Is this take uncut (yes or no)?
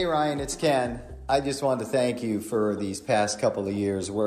no